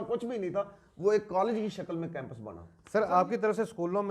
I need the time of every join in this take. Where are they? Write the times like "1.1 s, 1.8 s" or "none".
2.8 s